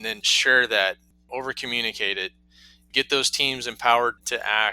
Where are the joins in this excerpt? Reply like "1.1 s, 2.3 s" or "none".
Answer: 1.3 s